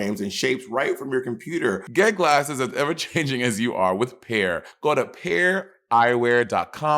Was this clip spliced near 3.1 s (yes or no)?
no